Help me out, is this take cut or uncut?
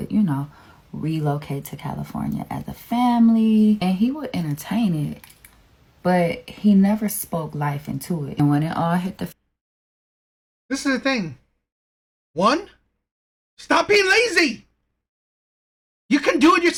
uncut